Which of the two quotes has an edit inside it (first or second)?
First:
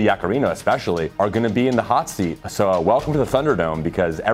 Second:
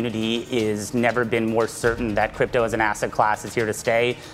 first